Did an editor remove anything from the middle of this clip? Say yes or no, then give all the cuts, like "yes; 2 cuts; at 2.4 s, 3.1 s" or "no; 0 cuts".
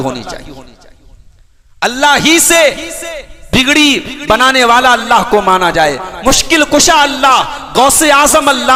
no; 0 cuts